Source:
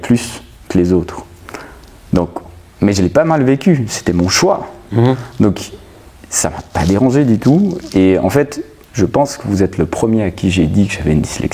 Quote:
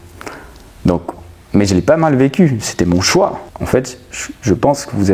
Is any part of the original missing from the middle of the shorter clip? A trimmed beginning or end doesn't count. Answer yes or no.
yes